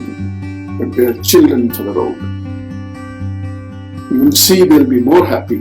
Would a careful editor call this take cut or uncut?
cut